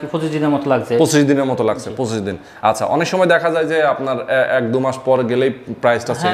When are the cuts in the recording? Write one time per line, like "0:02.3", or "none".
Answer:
none